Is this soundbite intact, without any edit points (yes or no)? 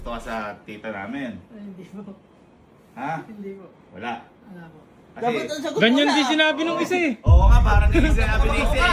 yes